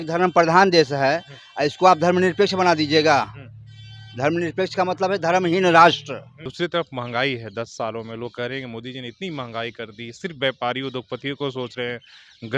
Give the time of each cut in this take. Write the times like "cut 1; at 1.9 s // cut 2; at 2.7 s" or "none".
cut 1; at 6.4 s